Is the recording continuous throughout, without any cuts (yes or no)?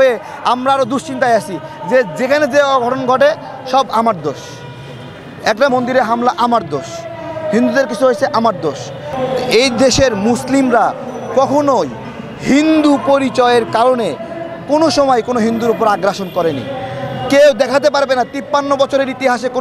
no